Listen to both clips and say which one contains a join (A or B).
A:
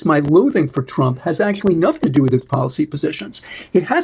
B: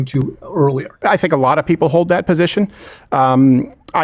B